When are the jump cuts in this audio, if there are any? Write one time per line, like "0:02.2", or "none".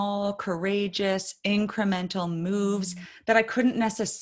none